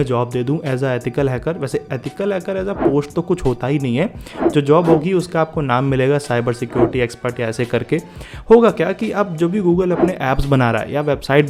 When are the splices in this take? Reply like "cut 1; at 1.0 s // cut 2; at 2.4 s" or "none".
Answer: none